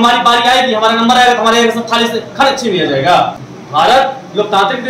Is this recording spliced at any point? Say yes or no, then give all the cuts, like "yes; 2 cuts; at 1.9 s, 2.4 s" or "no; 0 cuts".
yes; 1 cut; at 3.4 s